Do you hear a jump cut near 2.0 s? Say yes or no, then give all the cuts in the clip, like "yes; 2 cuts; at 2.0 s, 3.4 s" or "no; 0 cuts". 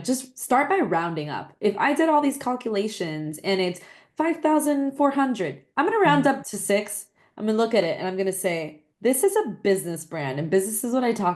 no; 0 cuts